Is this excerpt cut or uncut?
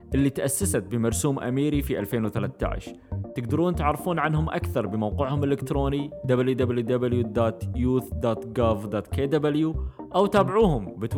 uncut